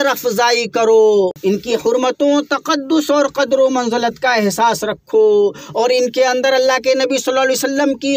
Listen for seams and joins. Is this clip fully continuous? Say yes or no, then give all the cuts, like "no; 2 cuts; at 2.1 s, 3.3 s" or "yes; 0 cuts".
no; 1 cut; at 1.4 s